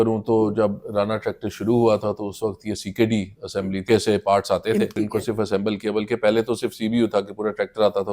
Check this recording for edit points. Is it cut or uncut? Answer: cut